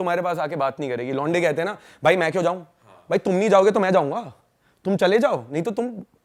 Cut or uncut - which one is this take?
uncut